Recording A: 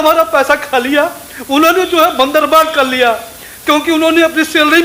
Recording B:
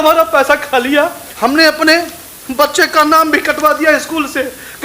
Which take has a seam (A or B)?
B